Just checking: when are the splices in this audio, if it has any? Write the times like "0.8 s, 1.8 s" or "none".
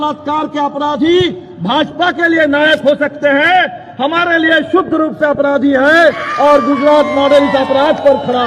none